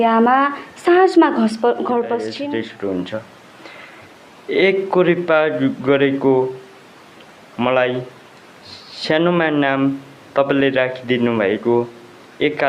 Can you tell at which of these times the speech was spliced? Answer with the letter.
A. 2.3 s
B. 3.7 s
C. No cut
A